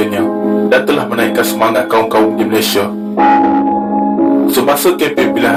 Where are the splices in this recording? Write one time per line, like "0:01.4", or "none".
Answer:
none